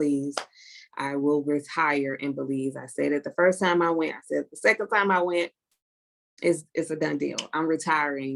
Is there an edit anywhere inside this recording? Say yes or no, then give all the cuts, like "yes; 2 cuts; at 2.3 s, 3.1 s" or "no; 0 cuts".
no; 0 cuts